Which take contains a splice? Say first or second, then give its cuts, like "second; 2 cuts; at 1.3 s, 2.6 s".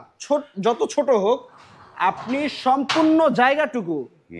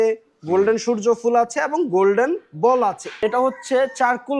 second; 1 cut; at 3.2 s